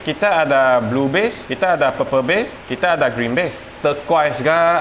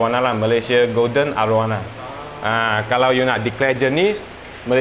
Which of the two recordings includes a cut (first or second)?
first